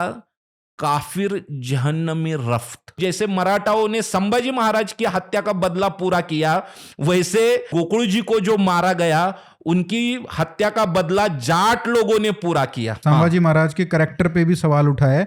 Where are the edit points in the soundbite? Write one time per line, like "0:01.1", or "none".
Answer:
0:02.9
0:07.7
0:12.9